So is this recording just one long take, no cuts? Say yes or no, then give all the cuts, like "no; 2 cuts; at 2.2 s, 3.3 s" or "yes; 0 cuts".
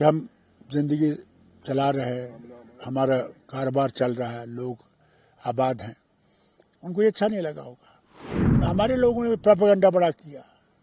no; 1 cut; at 8.5 s